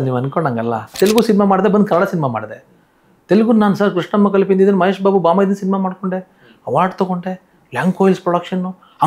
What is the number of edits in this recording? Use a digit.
1